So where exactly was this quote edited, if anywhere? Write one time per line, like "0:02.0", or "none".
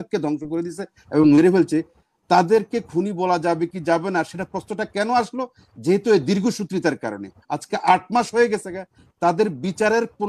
none